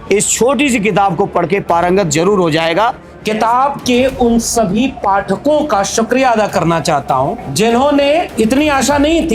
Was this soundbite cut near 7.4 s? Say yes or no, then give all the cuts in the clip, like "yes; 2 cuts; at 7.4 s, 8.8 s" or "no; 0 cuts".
yes; 3 cuts; at 3.1 s, 7.4 s, 8.3 s